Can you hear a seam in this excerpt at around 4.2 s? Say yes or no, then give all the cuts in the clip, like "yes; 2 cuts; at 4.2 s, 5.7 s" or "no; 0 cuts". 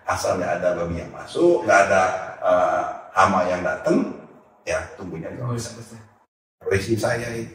no; 1 cut; at 6.5 s